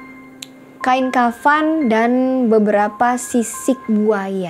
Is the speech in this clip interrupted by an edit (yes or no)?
no